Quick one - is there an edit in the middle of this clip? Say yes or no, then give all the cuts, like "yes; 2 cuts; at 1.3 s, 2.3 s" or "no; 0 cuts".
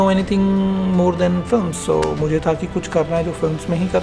no; 0 cuts